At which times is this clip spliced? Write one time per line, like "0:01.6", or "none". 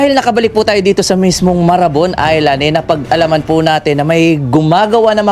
none